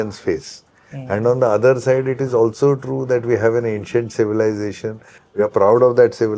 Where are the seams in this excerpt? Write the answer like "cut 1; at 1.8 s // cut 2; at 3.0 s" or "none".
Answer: none